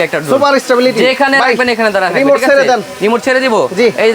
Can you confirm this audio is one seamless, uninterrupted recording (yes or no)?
yes